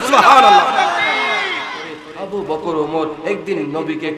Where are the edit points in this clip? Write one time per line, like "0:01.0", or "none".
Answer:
0:02.1